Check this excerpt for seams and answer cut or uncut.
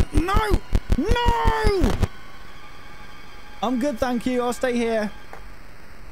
cut